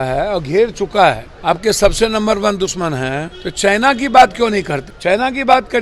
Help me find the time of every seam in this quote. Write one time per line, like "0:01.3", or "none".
0:01.3
0:03.4
0:04.8